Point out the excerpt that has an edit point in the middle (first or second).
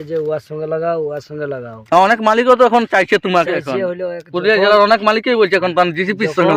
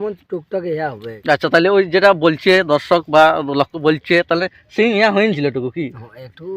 second